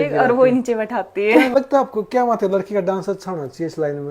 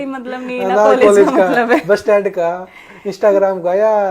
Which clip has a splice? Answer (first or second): first